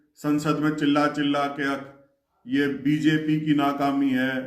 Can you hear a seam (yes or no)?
no